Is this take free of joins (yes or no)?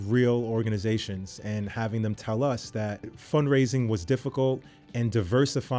no